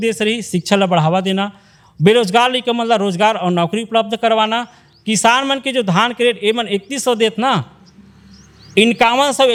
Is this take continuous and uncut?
yes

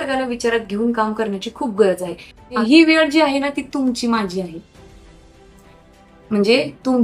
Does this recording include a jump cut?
yes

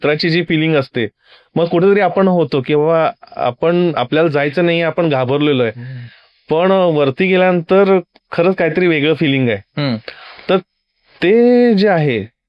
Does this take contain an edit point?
no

